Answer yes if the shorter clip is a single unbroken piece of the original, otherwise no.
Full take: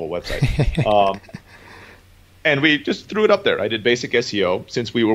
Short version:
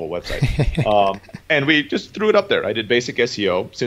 no